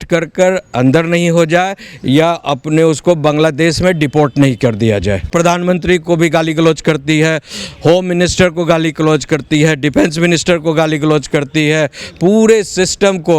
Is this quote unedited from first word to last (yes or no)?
no